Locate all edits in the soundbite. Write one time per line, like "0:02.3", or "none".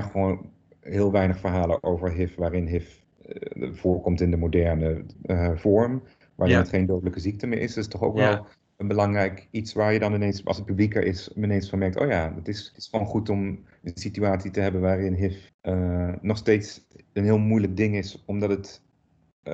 0:03.0
0:05.1
0:12.7
0:15.5